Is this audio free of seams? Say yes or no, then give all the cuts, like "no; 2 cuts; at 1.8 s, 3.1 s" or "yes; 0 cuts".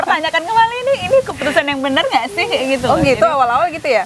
yes; 0 cuts